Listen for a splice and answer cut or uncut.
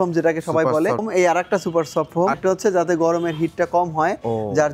cut